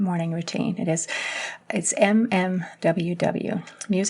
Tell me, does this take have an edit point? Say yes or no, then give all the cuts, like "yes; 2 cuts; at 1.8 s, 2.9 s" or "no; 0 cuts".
yes; 1 cut; at 1.6 s